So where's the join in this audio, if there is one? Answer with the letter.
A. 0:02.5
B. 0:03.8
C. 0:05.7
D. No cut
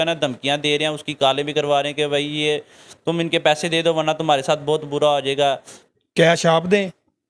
C